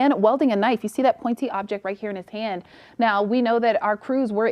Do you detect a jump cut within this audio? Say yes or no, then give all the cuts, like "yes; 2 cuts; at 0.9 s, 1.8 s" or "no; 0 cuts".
no; 0 cuts